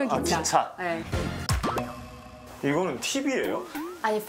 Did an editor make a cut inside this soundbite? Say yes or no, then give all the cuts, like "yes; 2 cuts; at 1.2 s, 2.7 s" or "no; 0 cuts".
yes; 1 cut; at 1.5 s